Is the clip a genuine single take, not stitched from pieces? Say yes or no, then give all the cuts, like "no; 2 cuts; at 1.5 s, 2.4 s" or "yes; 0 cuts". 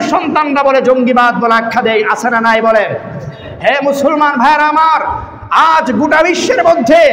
yes; 0 cuts